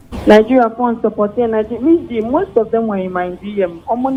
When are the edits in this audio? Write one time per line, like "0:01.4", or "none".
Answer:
none